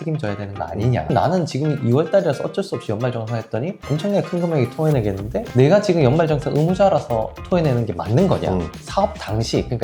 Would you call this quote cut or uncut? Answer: cut